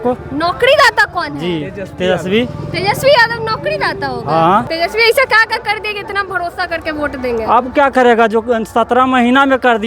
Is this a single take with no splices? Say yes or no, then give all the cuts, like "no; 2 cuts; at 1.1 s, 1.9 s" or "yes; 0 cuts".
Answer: no; 1 cut; at 4.7 s